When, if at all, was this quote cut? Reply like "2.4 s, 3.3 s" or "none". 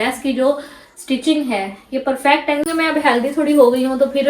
2.7 s